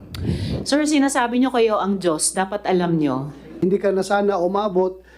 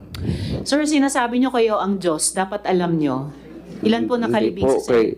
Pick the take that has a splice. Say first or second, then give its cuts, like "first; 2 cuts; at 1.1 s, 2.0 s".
first; 1 cut; at 3.6 s